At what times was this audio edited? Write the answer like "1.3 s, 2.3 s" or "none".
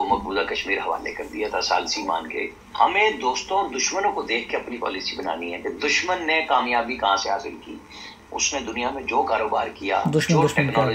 2.4 s